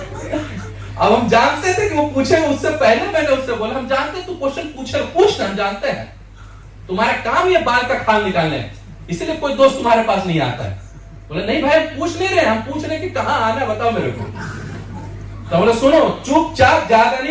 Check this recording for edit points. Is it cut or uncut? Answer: uncut